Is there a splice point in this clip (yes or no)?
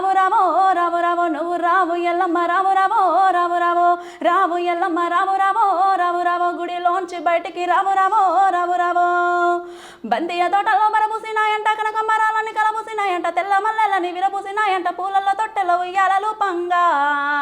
no